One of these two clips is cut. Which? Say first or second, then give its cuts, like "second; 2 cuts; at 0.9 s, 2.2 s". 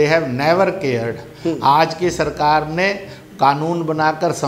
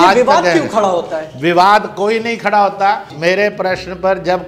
second; 1 cut; at 3.1 s